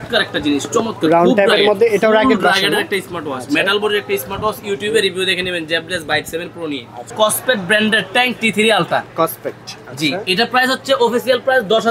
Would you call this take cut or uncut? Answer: cut